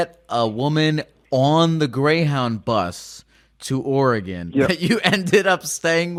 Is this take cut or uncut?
uncut